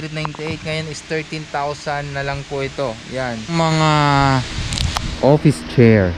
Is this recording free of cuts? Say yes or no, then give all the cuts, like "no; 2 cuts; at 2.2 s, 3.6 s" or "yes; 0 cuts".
no; 1 cut; at 3.5 s